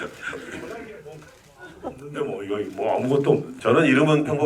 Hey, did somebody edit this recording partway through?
yes; 1 cut; at 3.5 s

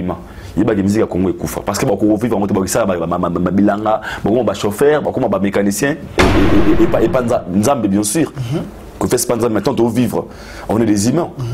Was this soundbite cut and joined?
yes; 1 cut; at 6.2 s

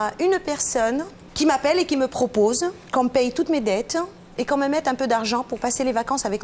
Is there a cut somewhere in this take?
yes; 2 cuts; at 1.2 s, 2.8 s

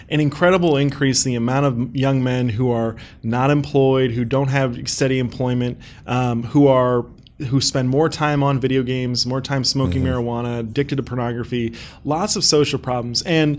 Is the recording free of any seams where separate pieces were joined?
yes; 0 cuts

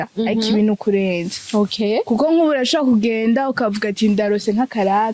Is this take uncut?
yes; 0 cuts

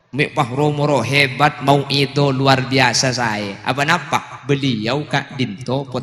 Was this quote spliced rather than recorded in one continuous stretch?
no; 0 cuts

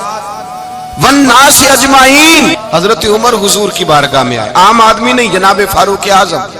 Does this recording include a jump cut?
yes; 1 cut; at 2.6 s

